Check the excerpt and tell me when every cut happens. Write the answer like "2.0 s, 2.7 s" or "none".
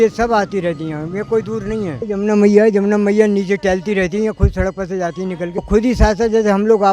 2.0 s, 5.7 s